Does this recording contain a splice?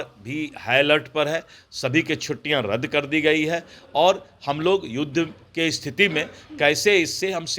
no; 0 cuts

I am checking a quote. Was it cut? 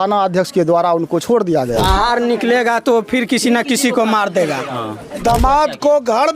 yes; 2 cuts; at 1.7 s, 5.2 s

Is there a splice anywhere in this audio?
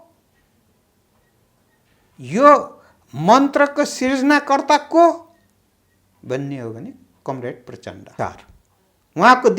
yes; 1 cut; at 8.1 s

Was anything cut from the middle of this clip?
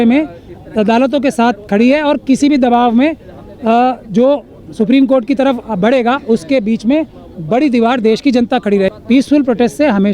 yes; 1 cut; at 8.9 s

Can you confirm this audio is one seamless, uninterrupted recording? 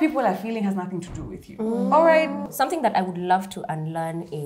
no; 1 cut; at 2.5 s

